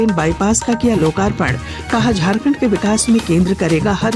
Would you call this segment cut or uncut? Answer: uncut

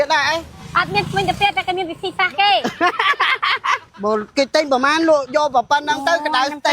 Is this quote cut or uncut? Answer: cut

